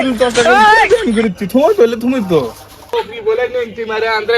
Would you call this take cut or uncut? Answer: cut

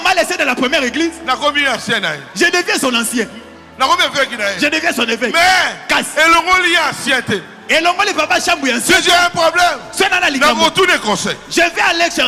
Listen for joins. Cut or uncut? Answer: uncut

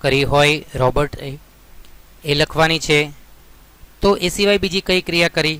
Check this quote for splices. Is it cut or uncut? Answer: uncut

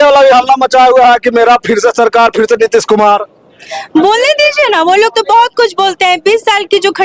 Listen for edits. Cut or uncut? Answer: uncut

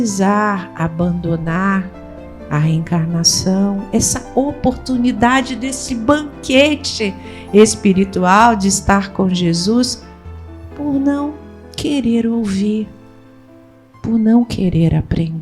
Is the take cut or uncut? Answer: uncut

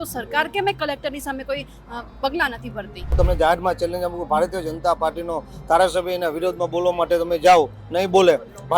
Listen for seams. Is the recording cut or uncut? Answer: cut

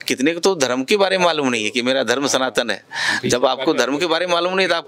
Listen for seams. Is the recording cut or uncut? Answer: uncut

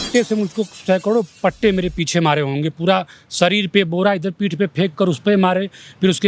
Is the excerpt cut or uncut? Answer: uncut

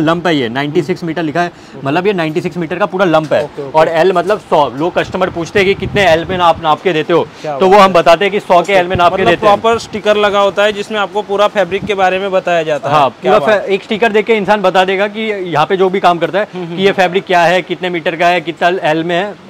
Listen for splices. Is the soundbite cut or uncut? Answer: uncut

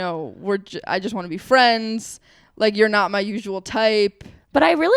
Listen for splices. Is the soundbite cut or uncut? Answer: uncut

